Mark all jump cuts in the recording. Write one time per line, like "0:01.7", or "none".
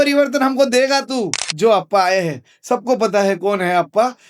0:01.4